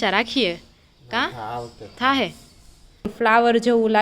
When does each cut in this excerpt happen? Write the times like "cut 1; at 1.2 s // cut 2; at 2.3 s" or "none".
cut 1; at 3.1 s